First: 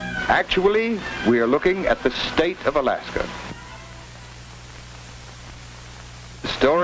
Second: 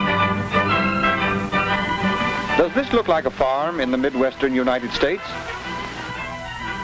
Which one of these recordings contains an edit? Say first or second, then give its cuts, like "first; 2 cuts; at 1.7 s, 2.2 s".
second; 1 cut; at 2.4 s